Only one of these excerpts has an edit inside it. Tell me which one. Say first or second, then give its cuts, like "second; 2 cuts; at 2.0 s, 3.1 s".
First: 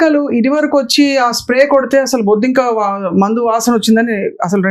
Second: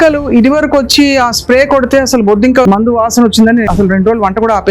second; 2 cuts; at 2.6 s, 3.7 s